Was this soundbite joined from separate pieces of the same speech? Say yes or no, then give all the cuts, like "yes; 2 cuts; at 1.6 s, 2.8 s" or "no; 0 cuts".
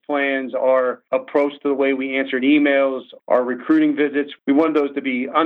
yes; 3 cuts; at 1.0 s, 3.1 s, 4.3 s